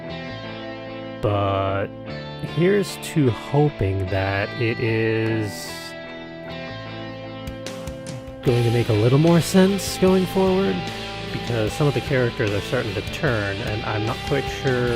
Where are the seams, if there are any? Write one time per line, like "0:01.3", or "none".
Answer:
0:05.1